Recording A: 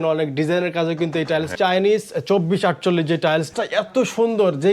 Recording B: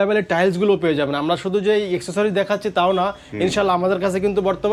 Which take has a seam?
A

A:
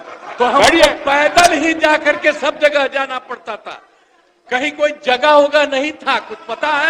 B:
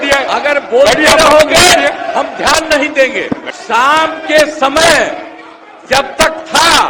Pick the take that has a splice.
B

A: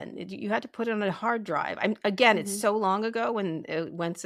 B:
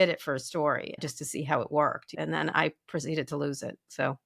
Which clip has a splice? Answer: B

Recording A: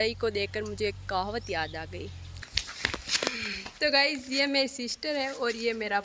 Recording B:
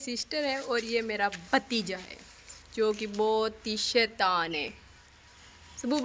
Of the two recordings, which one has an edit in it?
A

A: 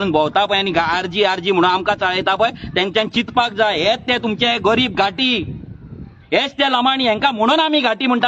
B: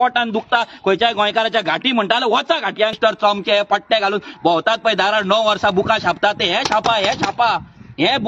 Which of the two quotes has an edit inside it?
B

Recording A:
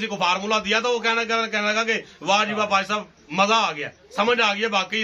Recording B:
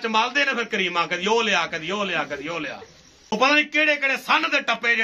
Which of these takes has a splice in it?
B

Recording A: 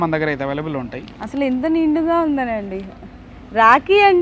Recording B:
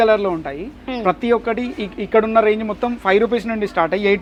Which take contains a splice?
A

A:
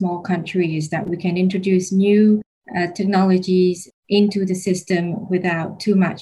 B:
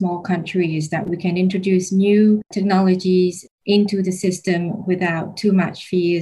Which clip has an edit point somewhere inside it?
B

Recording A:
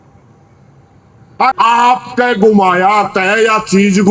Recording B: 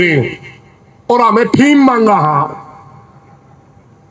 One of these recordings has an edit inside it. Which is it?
A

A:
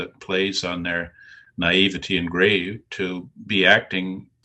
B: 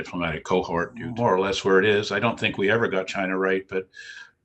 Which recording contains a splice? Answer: B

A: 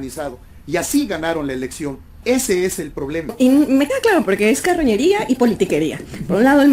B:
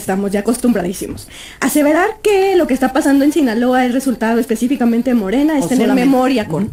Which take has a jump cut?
A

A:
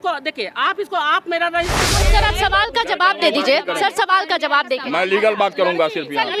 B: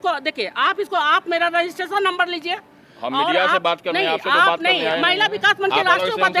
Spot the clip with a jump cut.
A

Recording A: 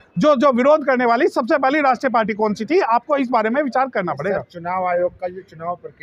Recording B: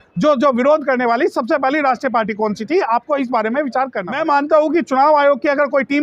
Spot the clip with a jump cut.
B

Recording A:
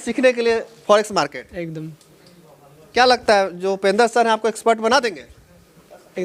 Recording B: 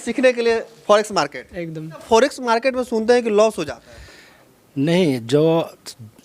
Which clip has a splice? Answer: B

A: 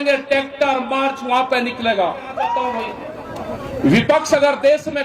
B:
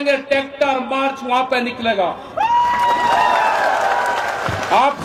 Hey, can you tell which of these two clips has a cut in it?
A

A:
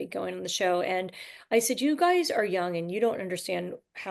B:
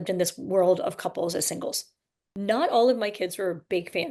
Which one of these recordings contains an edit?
B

